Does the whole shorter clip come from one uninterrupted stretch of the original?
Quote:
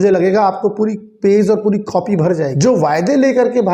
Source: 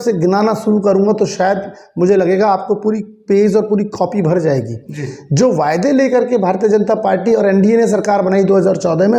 no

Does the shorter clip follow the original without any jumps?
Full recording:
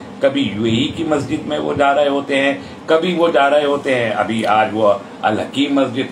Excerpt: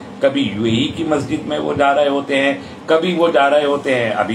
yes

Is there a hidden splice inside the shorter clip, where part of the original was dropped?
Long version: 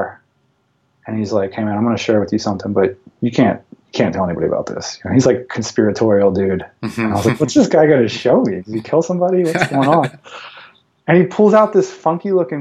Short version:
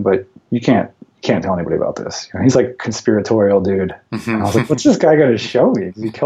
no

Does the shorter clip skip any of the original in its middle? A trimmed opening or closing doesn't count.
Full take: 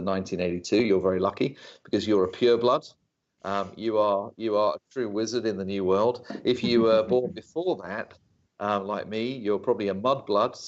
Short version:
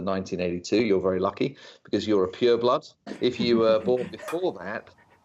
yes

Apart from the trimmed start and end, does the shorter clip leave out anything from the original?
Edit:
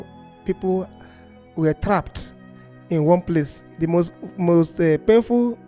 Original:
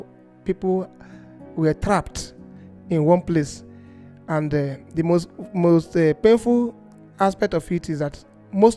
yes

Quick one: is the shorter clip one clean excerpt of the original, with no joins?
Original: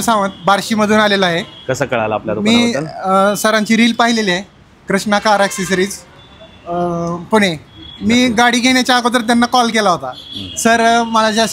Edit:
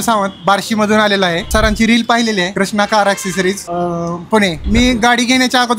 no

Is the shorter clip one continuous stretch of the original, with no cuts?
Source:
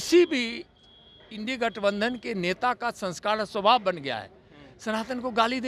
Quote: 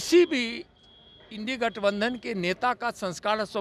yes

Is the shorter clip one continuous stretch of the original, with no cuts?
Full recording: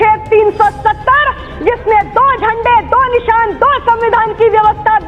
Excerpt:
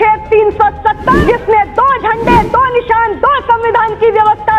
no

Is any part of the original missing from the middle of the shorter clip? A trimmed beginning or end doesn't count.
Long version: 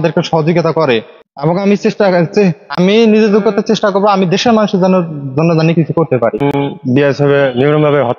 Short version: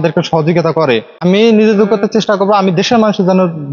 yes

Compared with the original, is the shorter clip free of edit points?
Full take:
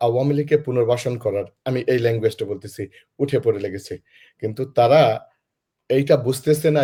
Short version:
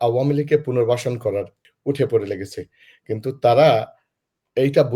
no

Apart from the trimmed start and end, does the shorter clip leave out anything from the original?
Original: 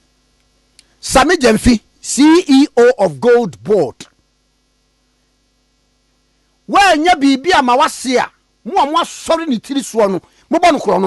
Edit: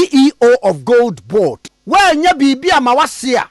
yes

